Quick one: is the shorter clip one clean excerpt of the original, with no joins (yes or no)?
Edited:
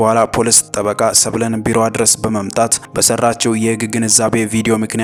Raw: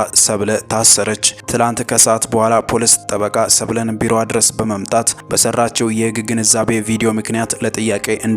yes